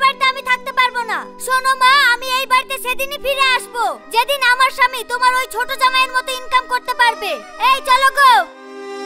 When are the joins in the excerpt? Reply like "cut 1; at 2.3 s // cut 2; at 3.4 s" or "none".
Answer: none